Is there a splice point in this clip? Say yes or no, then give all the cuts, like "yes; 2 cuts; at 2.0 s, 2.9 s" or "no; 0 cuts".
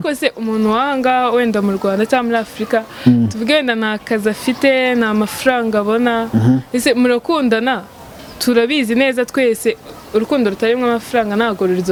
no; 0 cuts